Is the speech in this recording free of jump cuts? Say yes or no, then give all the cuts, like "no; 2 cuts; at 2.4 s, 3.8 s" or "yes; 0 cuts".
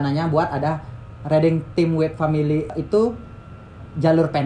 no; 1 cut; at 2.7 s